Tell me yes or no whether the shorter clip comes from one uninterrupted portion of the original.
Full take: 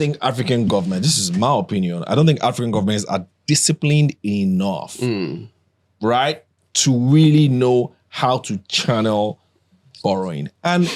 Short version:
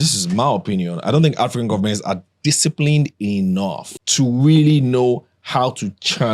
no